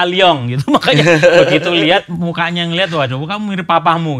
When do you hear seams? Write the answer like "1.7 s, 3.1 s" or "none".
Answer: none